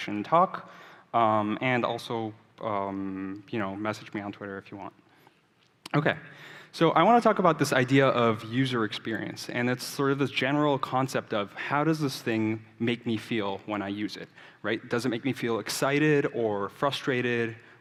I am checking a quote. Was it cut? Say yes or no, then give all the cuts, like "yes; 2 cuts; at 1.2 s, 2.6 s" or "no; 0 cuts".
no; 0 cuts